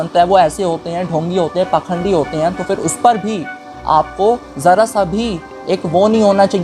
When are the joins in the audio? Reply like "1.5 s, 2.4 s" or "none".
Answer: none